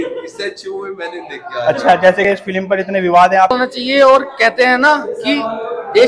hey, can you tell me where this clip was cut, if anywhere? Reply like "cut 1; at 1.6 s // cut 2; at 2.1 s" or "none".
cut 1; at 3.5 s